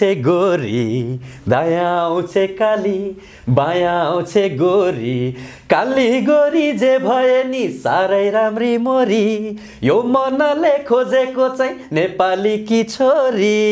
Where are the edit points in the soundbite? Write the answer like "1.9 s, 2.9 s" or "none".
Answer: none